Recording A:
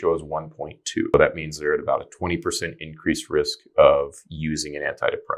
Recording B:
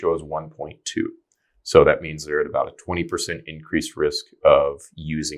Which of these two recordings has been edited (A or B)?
A